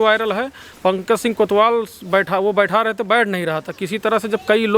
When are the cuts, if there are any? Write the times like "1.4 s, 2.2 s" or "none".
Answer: none